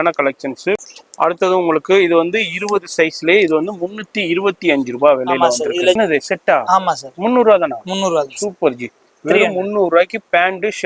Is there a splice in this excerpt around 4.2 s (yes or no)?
no